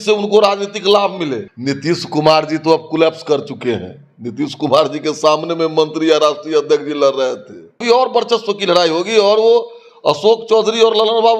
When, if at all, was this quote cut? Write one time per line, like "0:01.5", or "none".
0:01.5
0:07.8